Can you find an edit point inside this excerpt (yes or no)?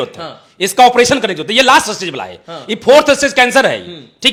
no